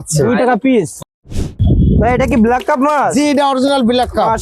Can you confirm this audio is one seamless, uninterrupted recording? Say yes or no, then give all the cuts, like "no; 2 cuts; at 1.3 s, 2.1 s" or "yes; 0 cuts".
no; 1 cut; at 1.0 s